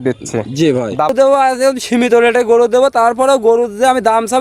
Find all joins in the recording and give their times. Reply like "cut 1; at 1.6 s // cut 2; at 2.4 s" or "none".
cut 1; at 1.1 s